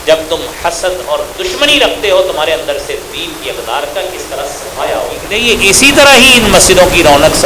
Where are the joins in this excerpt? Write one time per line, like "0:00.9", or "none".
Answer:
0:05.3